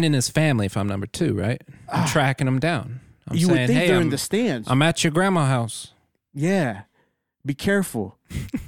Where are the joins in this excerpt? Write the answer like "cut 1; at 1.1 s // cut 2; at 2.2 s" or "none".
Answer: none